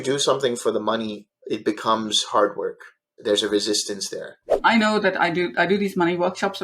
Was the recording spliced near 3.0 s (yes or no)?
yes